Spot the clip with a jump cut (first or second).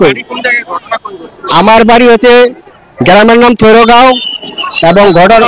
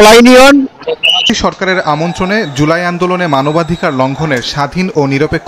second